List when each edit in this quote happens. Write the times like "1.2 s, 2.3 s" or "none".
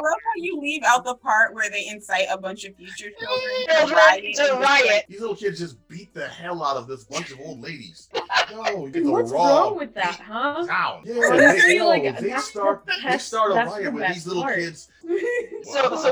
5.1 s, 8.4 s, 11.0 s, 15.1 s